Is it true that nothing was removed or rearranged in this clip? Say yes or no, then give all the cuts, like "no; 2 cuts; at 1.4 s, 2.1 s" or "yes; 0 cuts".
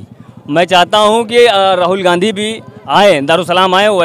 yes; 0 cuts